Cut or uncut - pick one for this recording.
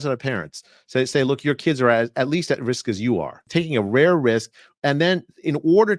cut